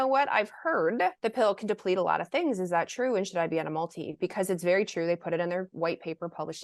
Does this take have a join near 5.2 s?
no; 1 cut; at 1.2 s

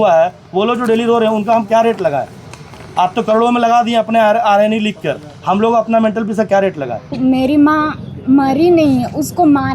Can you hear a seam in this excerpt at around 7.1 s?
yes; 1 cut; at 7.1 s

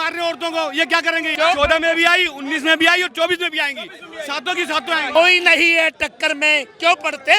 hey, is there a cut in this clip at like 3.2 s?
no; 2 cuts; at 1.3 s, 5.1 s

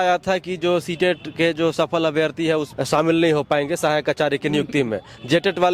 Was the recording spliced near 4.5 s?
no; 1 cut; at 2.7 s

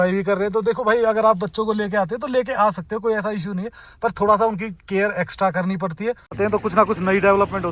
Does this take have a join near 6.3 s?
yes; 1 cut; at 6.3 s

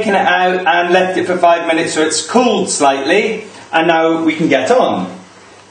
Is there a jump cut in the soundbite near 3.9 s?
no; 0 cuts

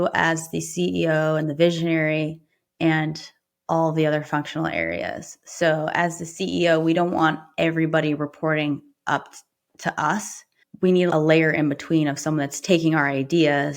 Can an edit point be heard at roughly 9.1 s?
no; 1 cut; at 11.1 s

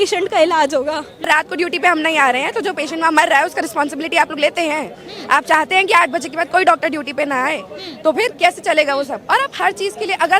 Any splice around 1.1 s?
yes; 1 cut; at 1.1 s

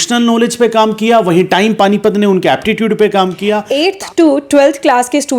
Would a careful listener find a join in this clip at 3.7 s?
yes; 1 cut; at 3.7 s

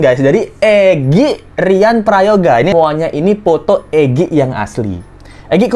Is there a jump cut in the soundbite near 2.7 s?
yes; 1 cut; at 2.7 s

